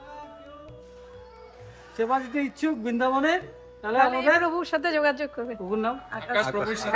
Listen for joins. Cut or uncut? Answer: uncut